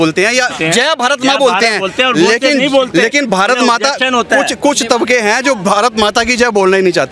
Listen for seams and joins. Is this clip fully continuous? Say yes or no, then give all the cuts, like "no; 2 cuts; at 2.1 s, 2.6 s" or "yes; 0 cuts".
yes; 0 cuts